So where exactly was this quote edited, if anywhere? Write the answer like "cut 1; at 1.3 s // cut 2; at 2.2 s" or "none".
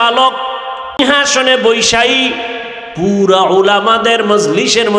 cut 1; at 1.0 s